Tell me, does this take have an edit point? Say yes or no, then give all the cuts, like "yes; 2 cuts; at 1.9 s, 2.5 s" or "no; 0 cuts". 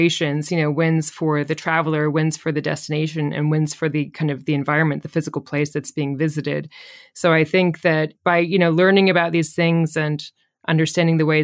no; 0 cuts